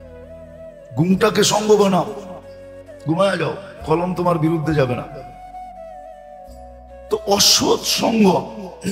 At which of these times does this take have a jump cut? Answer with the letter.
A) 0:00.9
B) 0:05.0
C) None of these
A